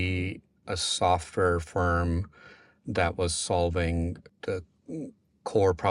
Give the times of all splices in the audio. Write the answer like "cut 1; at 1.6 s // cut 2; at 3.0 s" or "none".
cut 1; at 4.3 s